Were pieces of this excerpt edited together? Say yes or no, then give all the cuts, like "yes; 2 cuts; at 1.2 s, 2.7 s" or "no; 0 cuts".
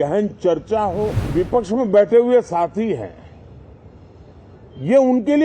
yes; 1 cut; at 1.2 s